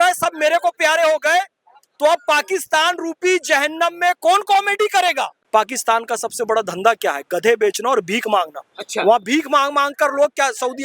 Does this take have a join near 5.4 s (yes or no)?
yes